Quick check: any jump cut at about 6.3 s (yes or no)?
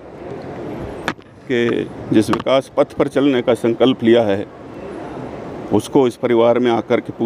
no